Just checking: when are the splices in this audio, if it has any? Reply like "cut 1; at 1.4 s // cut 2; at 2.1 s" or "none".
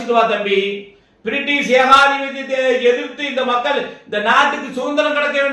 none